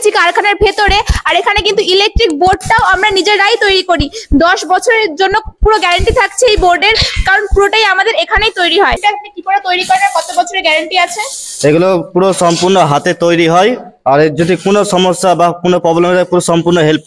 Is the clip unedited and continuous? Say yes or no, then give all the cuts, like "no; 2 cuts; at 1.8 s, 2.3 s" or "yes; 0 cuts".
no; 1 cut; at 9.0 s